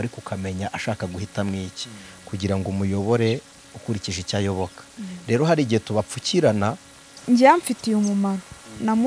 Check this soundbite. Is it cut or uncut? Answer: cut